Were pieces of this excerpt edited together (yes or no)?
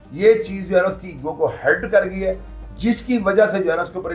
no